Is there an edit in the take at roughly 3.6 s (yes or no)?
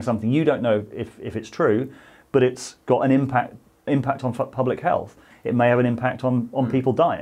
no